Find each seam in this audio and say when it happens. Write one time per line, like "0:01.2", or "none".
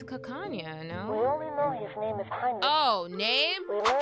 none